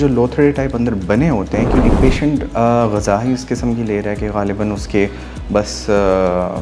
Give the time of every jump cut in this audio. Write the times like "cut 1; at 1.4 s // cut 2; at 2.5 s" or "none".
cut 1; at 1.8 s